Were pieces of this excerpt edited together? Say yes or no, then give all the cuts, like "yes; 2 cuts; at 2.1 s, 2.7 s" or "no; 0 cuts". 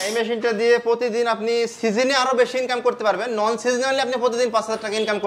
no; 0 cuts